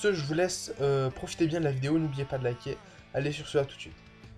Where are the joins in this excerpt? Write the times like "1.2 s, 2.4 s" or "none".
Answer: none